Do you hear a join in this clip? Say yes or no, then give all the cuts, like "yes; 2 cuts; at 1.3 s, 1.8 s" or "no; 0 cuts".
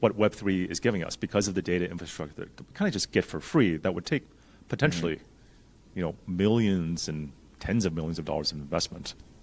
no; 0 cuts